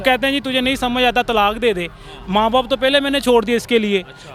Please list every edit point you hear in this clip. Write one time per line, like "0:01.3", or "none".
none